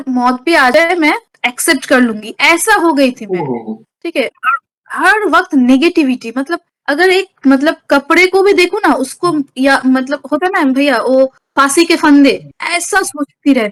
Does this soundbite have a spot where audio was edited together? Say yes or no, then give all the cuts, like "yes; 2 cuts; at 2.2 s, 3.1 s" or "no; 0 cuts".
no; 0 cuts